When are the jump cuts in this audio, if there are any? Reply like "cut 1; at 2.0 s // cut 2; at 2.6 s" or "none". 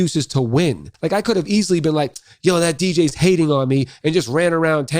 cut 1; at 0.9 s